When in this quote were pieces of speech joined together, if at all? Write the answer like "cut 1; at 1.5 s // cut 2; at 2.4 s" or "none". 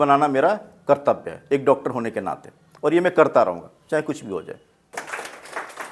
cut 1; at 4.8 s